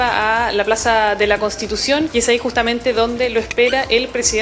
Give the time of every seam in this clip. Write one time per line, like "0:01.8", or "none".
0:02.1